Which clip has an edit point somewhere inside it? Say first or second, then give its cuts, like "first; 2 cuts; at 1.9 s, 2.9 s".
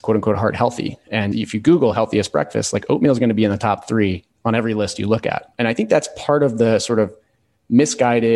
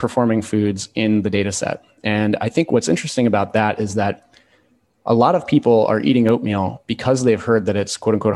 first; 2 cuts; at 1.3 s, 5.5 s